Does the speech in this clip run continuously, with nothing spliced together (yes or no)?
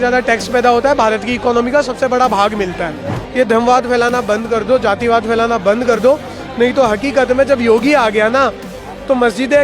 no